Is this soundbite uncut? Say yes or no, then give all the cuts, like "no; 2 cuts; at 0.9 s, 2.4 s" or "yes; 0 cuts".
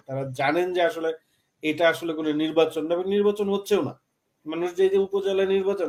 yes; 0 cuts